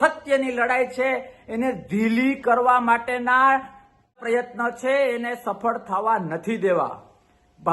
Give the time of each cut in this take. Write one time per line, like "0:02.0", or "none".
0:04.2